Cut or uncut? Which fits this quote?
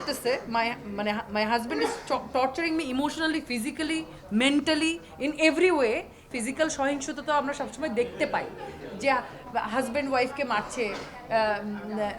cut